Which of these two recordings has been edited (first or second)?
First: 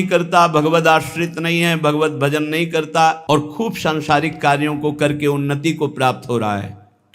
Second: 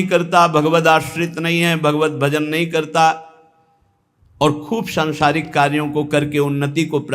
first